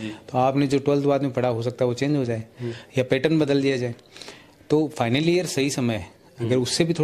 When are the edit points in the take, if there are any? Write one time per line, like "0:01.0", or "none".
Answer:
none